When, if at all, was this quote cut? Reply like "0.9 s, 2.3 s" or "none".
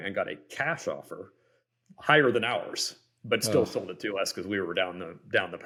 none